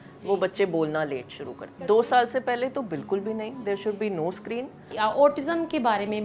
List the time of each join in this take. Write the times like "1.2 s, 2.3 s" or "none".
1.7 s, 4.9 s